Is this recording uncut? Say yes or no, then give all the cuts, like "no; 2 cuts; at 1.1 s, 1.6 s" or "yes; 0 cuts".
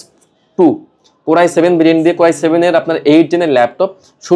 yes; 0 cuts